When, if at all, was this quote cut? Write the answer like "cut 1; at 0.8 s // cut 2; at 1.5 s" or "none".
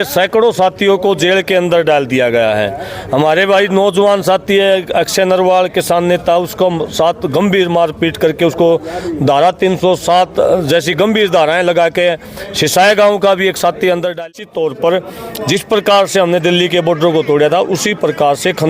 cut 1; at 14.2 s

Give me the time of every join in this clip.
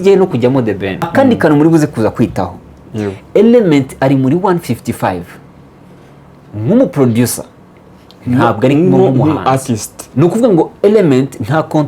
cut 1; at 1.0 s // cut 2; at 10.0 s

